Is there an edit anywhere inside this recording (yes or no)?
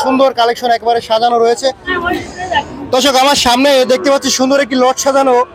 yes